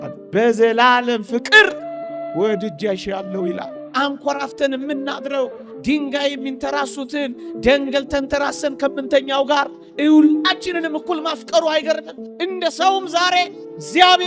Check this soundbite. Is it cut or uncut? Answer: cut